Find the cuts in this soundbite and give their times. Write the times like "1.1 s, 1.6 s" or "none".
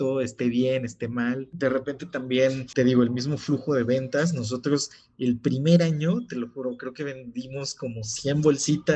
1.5 s, 2.6 s